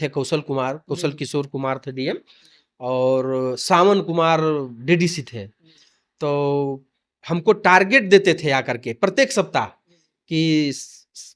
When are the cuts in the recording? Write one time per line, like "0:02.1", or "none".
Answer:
none